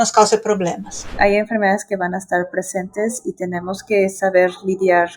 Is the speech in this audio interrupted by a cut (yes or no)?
yes